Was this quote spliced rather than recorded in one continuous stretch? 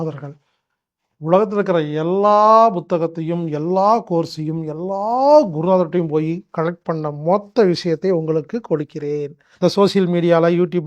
yes; 1 cut; at 9.4 s

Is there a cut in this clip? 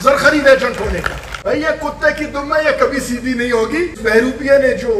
yes; 2 cuts; at 1.2 s, 4.0 s

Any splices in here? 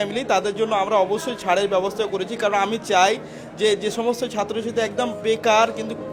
no; 0 cuts

